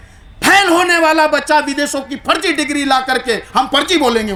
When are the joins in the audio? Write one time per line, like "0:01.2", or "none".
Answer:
none

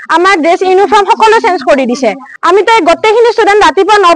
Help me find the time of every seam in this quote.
0:02.3

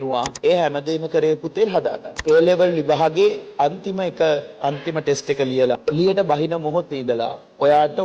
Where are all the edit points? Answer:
0:02.1
0:05.8

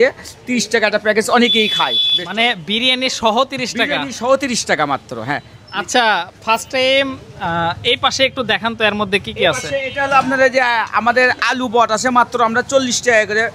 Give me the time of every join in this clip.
none

